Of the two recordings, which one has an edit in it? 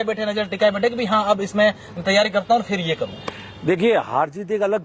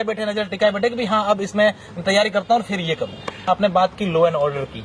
second; 1 cut; at 3.7 s

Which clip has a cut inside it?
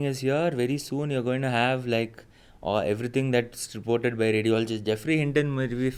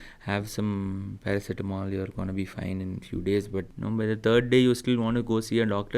second; 1 cut; at 3.7 s

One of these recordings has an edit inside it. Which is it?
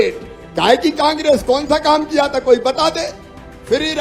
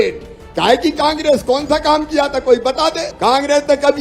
second; 1 cut; at 3.1 s

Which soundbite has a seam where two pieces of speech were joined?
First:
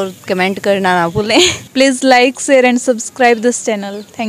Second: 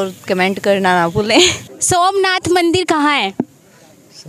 first; 1 cut; at 1.7 s

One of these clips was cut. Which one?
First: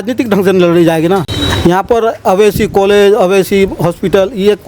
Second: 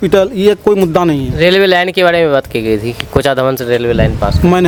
first; 1 cut; at 1.4 s

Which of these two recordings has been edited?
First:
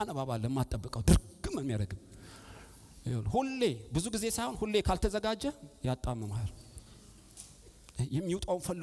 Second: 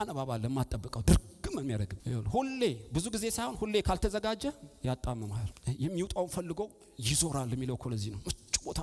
second; 2 cuts; at 2.0 s, 5.5 s

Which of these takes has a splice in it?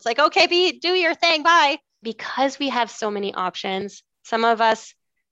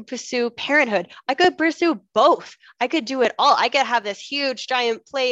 first; 1 cut; at 2.1 s

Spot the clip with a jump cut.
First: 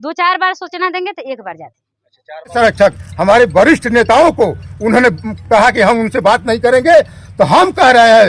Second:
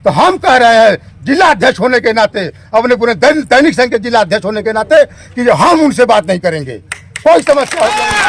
first; 1 cut; at 2.5 s

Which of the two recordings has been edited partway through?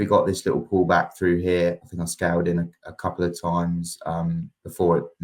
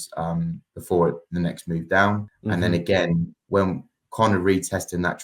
second; 1 cut; at 2.3 s

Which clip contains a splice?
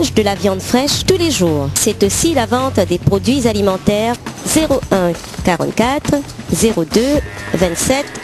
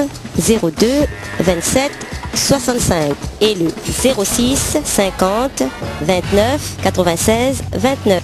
first; 2 cuts; at 1.7 s, 4.2 s

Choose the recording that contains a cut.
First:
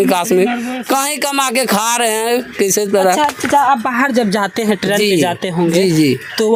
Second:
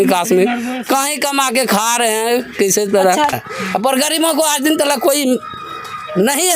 second; 1 cut; at 3.4 s

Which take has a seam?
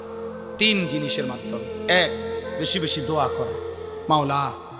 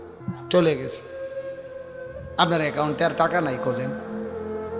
second; 1 cut; at 3.7 s

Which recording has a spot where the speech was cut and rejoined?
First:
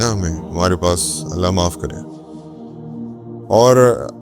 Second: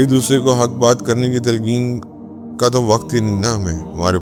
first; 2 cuts; at 2.1 s, 3.4 s

